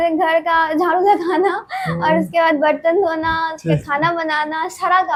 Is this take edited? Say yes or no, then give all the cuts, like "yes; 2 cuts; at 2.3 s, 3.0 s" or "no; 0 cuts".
no; 0 cuts